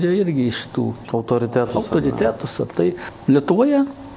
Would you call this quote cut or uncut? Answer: cut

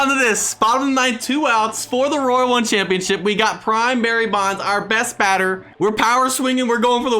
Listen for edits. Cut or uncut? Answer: cut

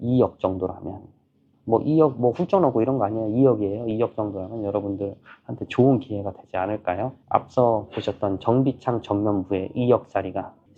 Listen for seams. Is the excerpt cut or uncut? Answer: uncut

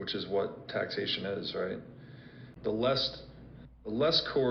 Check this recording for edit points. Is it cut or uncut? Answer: cut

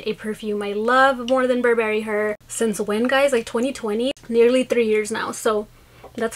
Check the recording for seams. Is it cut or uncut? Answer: cut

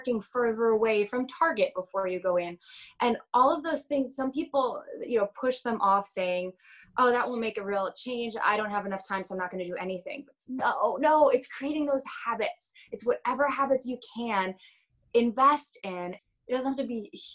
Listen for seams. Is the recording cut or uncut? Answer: cut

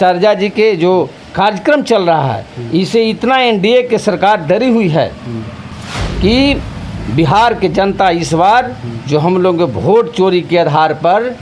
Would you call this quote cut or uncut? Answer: uncut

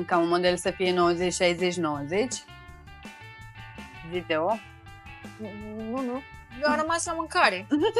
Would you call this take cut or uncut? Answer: uncut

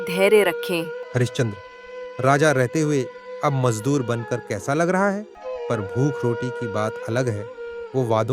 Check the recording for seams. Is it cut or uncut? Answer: cut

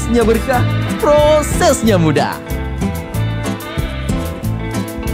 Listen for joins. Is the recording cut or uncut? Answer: uncut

